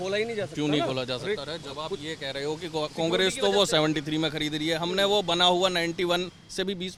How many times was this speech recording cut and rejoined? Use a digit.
0